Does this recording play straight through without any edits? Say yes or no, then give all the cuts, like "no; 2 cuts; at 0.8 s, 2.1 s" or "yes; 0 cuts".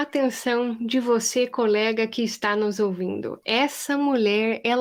yes; 0 cuts